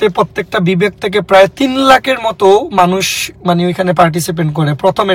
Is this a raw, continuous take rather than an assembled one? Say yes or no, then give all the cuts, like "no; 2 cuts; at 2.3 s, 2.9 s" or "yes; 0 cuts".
yes; 0 cuts